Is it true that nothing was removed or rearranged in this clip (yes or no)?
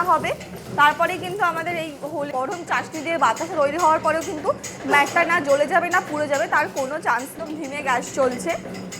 no